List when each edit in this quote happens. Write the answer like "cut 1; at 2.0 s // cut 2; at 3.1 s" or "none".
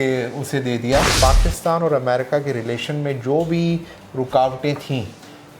cut 1; at 1.1 s